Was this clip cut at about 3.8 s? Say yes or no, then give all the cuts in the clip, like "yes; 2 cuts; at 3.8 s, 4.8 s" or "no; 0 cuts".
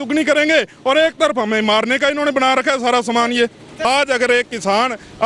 yes; 1 cut; at 3.8 s